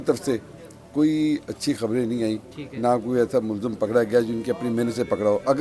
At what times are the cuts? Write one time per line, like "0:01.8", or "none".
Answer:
none